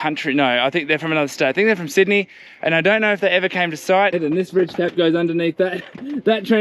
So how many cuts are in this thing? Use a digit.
1